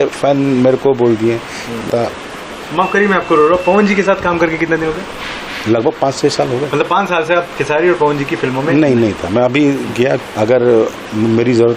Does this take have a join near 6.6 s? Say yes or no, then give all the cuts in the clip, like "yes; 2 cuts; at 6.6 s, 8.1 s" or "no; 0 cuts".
no; 2 cuts; at 1.9 s, 10.2 s